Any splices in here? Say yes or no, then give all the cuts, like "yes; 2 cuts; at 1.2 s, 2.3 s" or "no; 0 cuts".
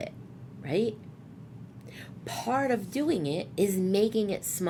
no; 0 cuts